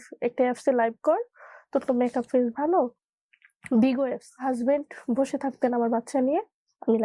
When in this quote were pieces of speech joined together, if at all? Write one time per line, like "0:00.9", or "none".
0:03.0
0:04.3